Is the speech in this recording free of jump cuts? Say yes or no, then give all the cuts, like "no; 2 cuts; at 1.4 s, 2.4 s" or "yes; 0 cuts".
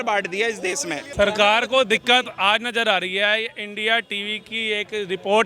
no; 1 cut; at 1.1 s